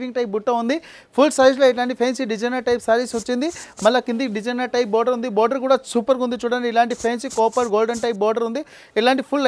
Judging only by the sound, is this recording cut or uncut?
uncut